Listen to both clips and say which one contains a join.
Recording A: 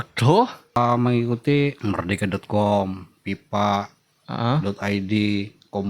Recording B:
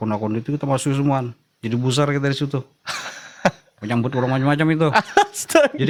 A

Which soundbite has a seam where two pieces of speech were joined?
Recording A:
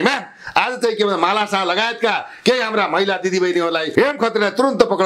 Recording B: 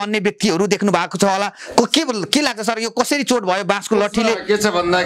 A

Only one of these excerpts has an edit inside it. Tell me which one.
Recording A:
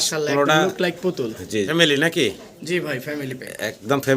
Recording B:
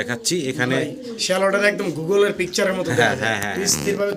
A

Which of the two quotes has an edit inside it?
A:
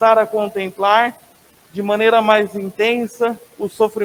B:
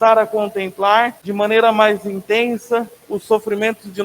B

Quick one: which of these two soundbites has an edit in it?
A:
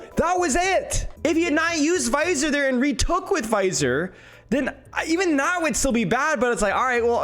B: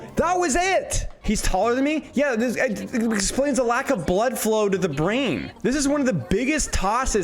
B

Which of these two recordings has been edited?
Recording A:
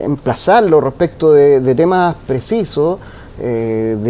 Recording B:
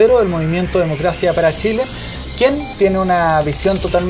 A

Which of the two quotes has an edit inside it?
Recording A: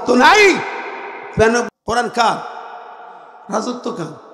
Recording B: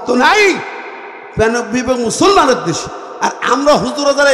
A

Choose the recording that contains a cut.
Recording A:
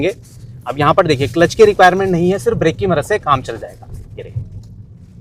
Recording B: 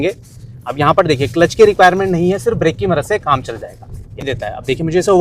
B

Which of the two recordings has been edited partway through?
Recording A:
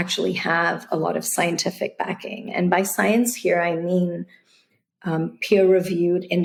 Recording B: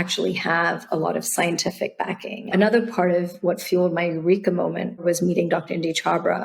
B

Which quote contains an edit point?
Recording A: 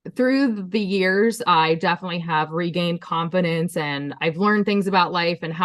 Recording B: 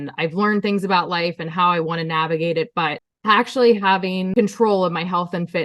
B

